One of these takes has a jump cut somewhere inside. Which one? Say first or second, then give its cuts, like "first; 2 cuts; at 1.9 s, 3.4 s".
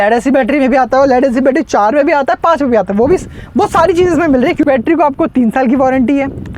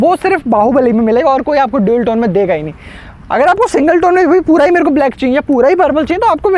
first; 1 cut; at 4.6 s